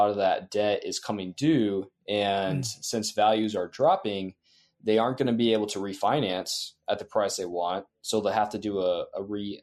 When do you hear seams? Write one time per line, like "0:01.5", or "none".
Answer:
none